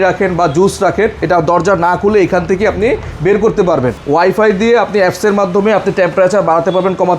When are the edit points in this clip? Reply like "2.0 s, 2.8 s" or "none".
4.0 s